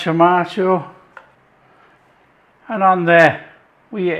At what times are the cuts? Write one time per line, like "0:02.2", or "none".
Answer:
0:02.0